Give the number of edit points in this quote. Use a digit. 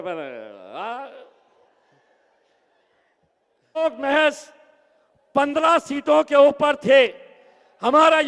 1